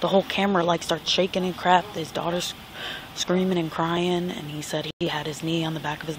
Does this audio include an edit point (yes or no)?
no